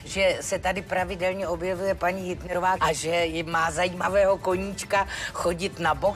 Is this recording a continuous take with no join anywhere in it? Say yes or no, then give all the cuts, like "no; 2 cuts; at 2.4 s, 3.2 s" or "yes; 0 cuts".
no; 1 cut; at 2.4 s